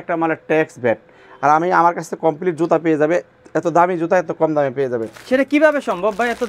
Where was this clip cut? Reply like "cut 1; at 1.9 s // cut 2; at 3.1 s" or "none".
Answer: none

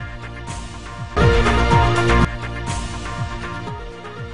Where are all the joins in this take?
none

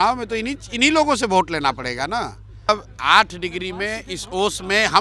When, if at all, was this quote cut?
cut 1; at 2.7 s

